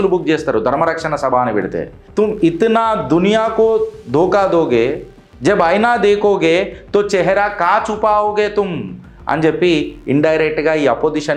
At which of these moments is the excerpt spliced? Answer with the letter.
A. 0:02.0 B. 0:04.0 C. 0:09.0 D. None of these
A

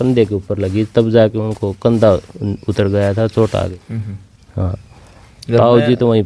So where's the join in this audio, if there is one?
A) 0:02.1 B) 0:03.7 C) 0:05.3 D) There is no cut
D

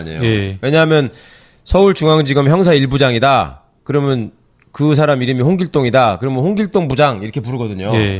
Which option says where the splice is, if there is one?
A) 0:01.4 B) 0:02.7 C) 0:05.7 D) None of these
C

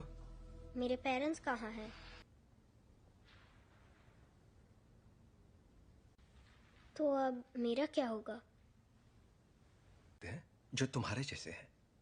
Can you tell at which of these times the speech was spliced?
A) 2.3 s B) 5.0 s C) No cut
A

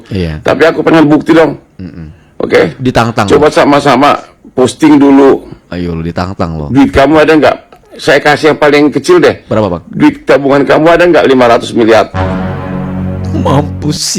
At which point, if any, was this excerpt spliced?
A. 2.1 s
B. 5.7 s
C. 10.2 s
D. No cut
D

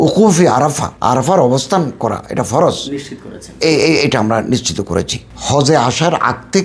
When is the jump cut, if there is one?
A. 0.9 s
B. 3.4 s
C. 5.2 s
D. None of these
C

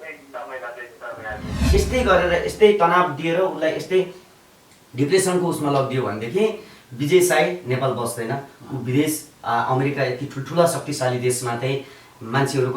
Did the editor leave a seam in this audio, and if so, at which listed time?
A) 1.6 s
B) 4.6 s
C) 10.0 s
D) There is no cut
A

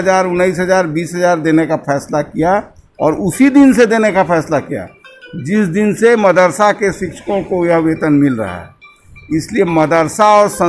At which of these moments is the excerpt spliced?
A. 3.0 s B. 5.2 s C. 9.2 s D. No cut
D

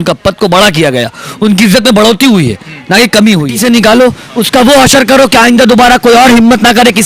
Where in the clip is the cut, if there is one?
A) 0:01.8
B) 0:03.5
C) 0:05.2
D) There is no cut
B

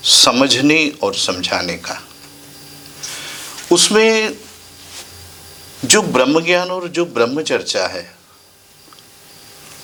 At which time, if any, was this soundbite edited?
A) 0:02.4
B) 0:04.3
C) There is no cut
C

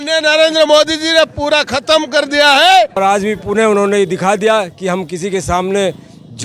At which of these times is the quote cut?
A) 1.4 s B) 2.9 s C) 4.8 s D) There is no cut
B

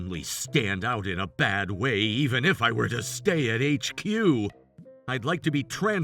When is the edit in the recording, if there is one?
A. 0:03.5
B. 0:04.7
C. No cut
B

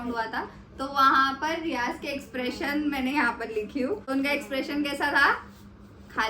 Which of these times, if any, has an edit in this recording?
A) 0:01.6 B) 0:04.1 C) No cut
C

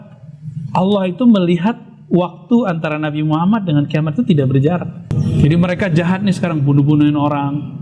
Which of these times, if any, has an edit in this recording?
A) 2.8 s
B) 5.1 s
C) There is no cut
B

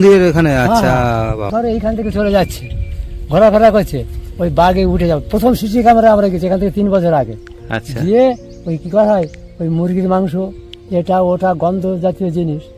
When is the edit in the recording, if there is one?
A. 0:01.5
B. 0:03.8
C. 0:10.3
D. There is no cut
A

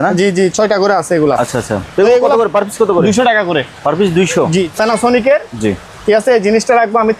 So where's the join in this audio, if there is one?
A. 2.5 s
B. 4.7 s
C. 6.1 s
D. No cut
B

